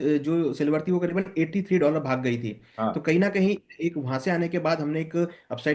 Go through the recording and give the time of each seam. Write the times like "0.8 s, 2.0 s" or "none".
none